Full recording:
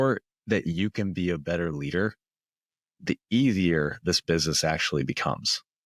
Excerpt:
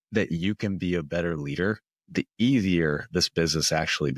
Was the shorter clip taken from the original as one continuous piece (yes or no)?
no